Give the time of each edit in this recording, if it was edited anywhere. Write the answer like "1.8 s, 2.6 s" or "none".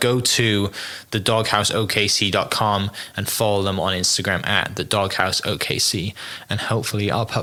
none